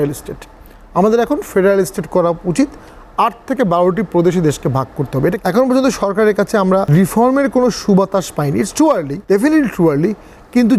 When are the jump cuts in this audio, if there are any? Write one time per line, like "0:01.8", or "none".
0:05.4
0:06.9
0:09.1